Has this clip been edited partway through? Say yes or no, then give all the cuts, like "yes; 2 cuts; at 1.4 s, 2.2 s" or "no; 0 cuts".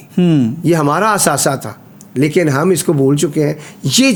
no; 0 cuts